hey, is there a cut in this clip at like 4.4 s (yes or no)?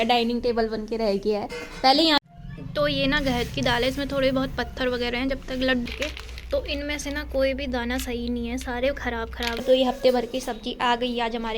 no